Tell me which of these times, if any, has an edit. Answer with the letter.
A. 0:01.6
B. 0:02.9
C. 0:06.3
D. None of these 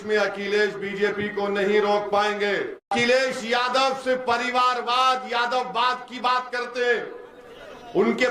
B